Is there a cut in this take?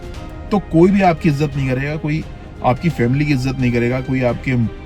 no; 0 cuts

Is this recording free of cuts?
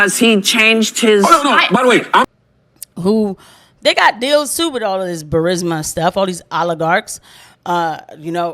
no; 1 cut; at 2.2 s

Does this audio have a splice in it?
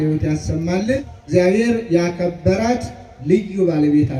yes; 1 cut; at 1.1 s

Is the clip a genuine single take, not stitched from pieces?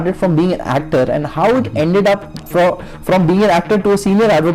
yes; 0 cuts

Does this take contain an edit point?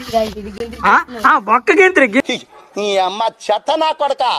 yes; 1 cut; at 2.2 s

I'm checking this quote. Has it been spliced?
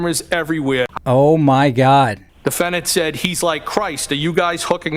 yes; 2 cuts; at 0.9 s, 2.3 s

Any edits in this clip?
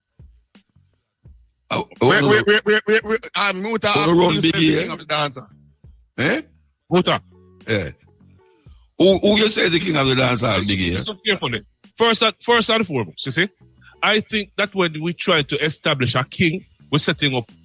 no; 0 cuts

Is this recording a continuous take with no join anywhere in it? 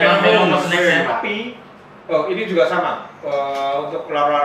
no; 1 cut; at 1.2 s

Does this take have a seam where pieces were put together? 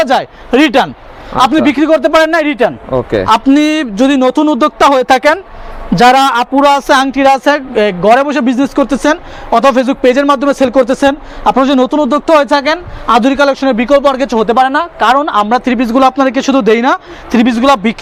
no; 0 cuts

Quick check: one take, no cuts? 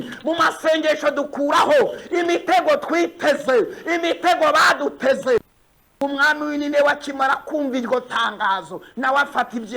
no; 1 cut; at 5.4 s

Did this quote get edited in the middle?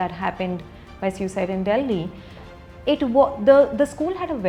no; 0 cuts

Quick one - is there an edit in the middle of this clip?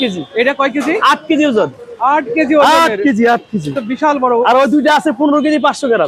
no; 0 cuts

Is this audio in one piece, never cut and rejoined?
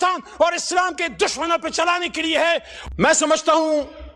no; 1 cut; at 2.7 s

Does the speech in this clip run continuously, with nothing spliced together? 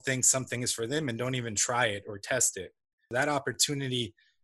no; 1 cut; at 3.1 s

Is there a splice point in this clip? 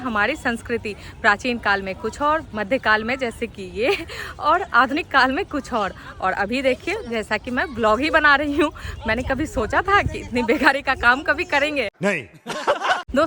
no; 0 cuts

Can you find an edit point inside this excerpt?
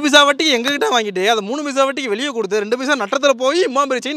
no; 0 cuts

